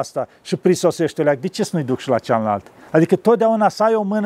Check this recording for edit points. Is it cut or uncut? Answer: uncut